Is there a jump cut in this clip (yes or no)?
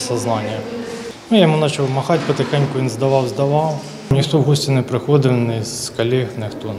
yes